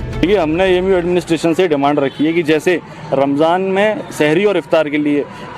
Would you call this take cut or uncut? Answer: cut